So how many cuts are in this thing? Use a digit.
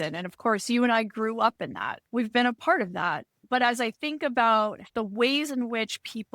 3